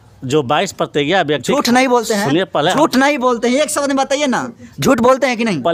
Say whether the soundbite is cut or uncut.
uncut